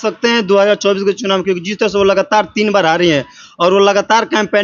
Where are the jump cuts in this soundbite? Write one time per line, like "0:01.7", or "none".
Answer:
none